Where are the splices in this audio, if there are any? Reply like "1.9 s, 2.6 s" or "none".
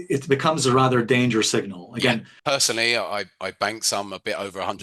2.3 s